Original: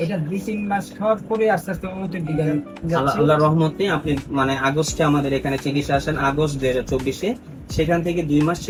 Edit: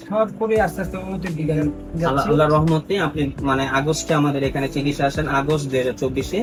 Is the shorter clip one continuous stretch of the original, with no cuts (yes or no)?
yes